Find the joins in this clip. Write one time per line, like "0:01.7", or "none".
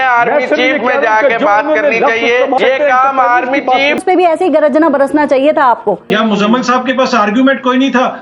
0:02.6
0:04.0
0:06.0